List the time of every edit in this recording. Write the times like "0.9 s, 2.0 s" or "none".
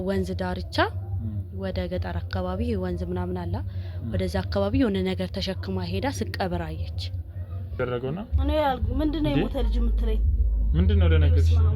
7.8 s